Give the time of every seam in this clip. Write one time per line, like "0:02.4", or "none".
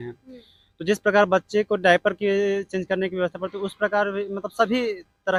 none